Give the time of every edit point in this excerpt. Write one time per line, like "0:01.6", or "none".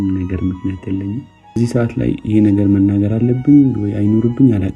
0:01.3